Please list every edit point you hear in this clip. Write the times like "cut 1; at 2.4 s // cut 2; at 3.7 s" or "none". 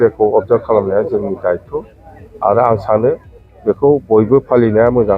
none